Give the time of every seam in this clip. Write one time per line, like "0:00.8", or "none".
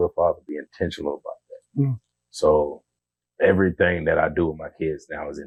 none